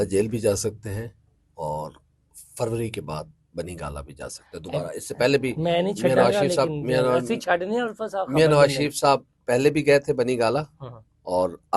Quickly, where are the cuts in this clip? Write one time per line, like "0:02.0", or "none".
none

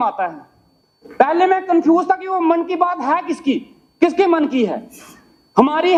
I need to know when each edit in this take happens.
none

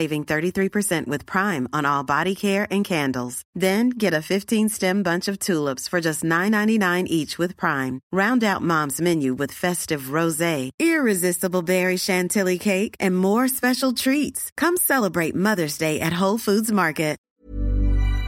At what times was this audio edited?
0:17.2

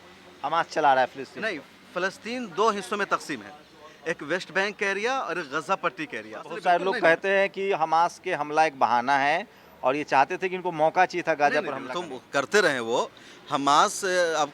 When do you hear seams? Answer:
0:06.5

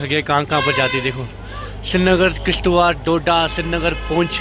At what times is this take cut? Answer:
none

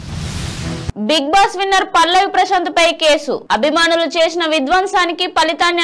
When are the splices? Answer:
none

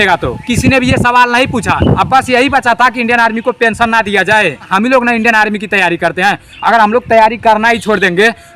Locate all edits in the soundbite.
0:02.0
0:04.7

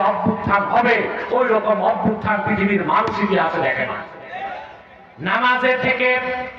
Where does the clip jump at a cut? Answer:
0:04.8

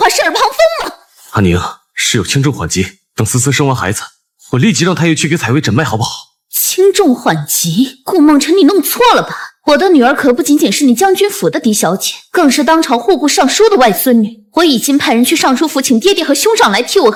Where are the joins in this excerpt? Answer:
none

